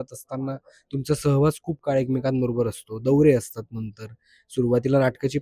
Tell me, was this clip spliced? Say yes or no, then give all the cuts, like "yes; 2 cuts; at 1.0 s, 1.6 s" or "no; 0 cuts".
no; 0 cuts